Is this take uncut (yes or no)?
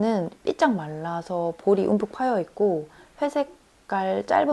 yes